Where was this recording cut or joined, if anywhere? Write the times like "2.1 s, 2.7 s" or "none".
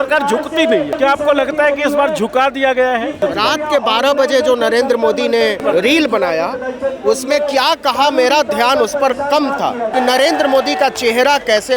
1.0 s, 3.2 s, 5.6 s, 9.9 s